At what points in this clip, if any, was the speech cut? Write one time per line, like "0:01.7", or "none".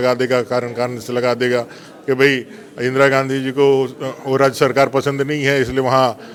none